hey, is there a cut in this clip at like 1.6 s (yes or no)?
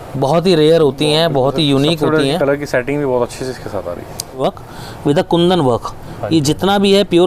no